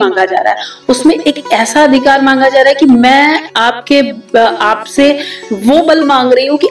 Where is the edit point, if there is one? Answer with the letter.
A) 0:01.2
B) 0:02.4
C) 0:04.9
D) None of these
D